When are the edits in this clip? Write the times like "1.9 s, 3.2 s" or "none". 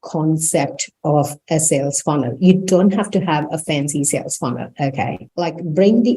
5.2 s